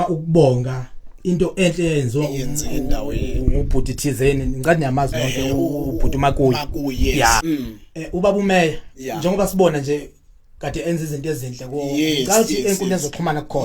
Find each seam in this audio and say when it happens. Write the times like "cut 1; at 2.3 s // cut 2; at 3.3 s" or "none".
cut 1; at 7.4 s

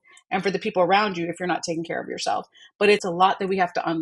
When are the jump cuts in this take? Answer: cut 1; at 3.0 s

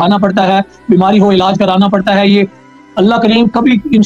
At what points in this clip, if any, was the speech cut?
cut 1; at 2.6 s

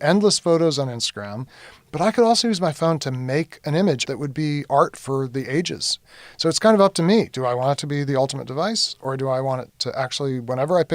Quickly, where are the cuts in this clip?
cut 1; at 1.6 s // cut 2; at 4.0 s // cut 3; at 6.0 s

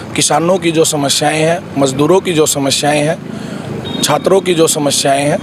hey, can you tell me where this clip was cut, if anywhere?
none

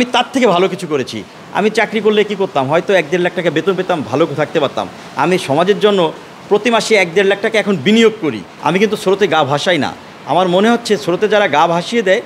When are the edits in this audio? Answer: cut 1; at 1.2 s // cut 2; at 8.5 s

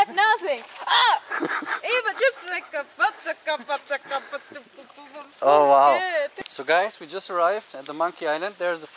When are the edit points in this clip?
cut 1; at 6.3 s

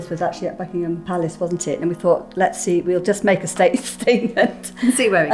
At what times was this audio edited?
none

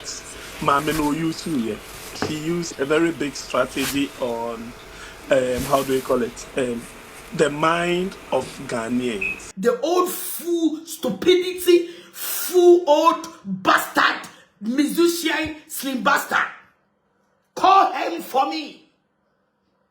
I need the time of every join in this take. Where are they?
cut 1; at 9.4 s

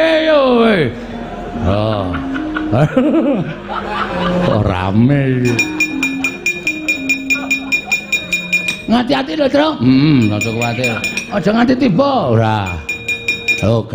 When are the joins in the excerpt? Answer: cut 1; at 5.6 s

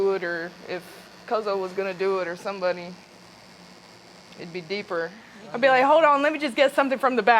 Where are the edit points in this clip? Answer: cut 1; at 5.3 s

